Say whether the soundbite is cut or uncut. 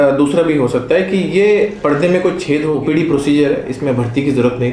cut